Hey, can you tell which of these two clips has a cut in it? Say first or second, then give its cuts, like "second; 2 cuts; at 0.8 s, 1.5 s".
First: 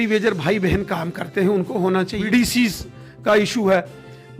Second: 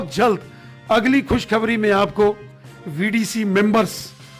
first; 1 cut; at 2.2 s